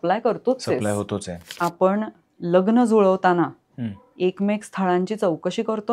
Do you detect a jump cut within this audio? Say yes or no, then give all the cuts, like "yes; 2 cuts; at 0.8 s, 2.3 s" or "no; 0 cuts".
yes; 1 cut; at 1.4 s